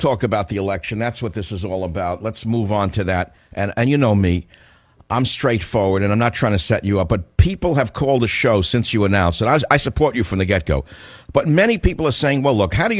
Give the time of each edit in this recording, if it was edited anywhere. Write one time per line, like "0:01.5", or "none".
none